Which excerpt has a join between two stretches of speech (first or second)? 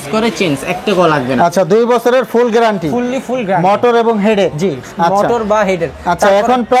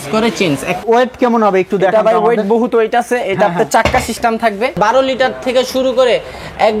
second